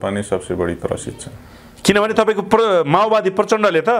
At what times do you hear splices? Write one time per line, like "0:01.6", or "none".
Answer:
none